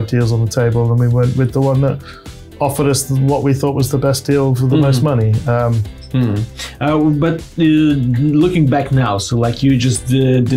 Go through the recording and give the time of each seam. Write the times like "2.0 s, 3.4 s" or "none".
none